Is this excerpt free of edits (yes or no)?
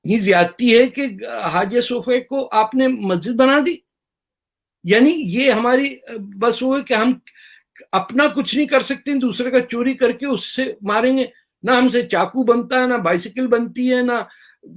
yes